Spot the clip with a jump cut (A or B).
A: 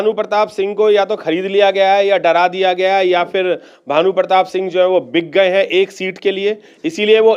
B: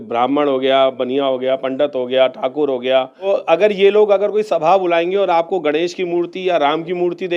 B